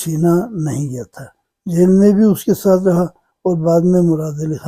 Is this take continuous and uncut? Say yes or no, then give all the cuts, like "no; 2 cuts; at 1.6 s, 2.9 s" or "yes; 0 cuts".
yes; 0 cuts